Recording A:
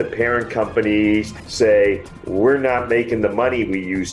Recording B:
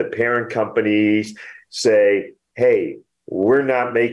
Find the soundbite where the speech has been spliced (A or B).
A